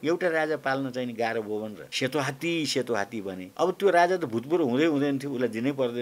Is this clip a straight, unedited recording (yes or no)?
no